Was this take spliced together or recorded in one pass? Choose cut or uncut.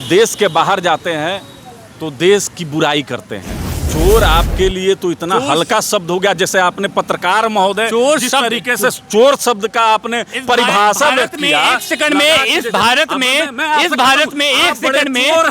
cut